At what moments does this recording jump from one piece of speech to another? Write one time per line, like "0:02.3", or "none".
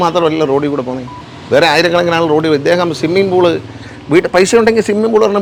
none